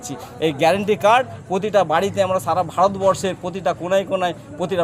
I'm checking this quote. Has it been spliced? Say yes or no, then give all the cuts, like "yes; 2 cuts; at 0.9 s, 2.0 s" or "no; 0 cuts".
no; 0 cuts